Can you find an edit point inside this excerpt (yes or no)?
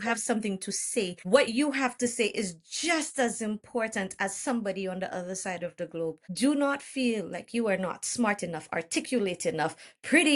yes